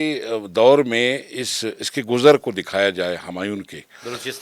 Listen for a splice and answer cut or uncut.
uncut